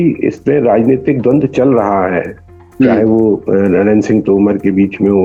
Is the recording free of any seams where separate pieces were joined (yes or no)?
yes